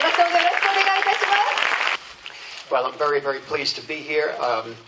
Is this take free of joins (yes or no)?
yes